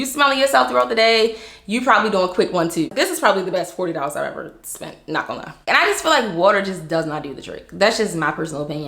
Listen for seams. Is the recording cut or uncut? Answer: cut